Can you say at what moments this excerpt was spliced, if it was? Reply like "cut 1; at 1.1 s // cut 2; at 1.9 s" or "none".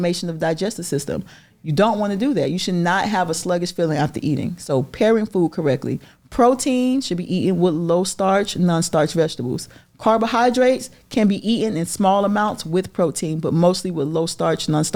none

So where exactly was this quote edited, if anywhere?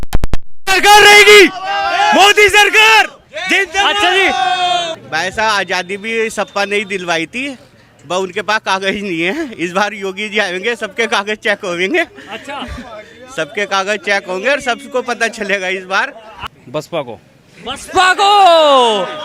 cut 1; at 5.0 s // cut 2; at 16.3 s

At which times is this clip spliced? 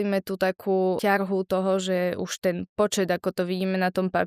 cut 1; at 1.0 s

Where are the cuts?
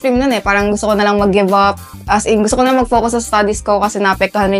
none

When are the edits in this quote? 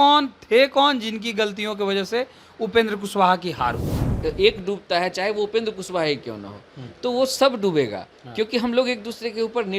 cut 1; at 3.9 s

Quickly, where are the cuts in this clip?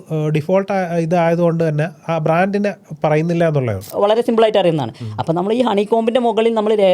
cut 1; at 3.9 s

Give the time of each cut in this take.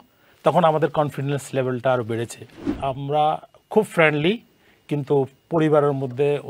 cut 1; at 2.6 s

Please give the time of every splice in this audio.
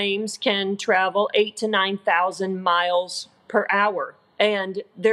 cut 1; at 4.2 s

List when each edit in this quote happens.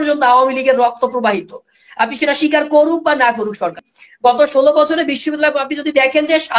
cut 1; at 3.8 s

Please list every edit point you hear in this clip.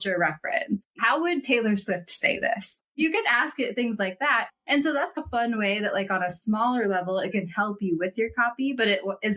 cut 1; at 0.8 s // cut 2; at 2.9 s

